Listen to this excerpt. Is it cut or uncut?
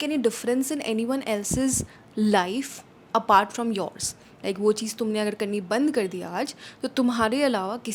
uncut